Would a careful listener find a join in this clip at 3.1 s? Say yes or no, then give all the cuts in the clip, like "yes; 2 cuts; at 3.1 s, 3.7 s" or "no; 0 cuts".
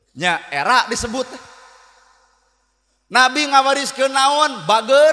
no; 0 cuts